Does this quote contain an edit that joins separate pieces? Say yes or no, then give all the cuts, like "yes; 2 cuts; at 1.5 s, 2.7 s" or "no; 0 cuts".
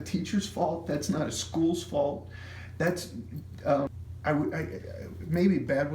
yes; 1 cut; at 3.9 s